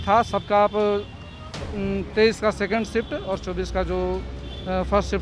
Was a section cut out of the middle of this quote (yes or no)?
no